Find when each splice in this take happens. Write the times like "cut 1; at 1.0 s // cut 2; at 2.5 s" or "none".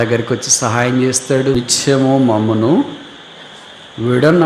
cut 1; at 1.6 s